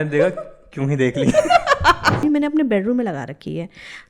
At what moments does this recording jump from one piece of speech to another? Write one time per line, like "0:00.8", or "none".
0:02.2

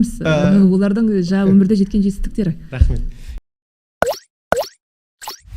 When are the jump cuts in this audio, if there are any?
0:03.4

